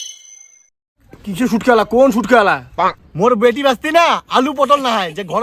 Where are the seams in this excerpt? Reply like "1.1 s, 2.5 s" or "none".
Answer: 2.6 s